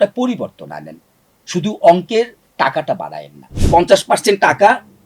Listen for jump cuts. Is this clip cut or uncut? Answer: cut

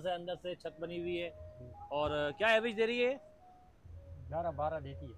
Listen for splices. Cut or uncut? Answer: uncut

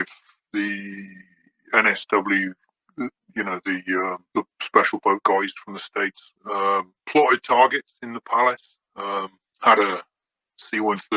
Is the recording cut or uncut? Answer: uncut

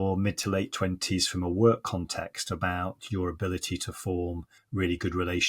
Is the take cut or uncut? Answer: cut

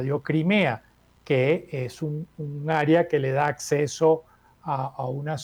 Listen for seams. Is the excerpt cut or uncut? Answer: uncut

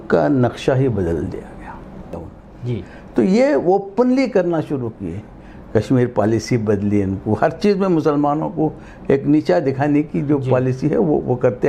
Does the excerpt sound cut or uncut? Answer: cut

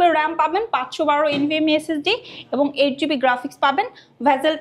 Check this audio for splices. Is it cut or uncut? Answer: uncut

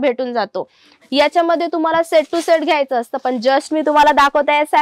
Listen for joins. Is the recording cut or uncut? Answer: cut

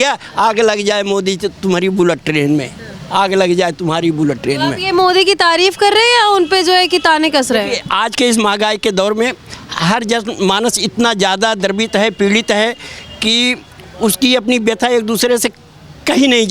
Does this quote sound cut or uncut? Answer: uncut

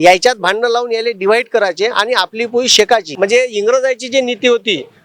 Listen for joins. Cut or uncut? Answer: cut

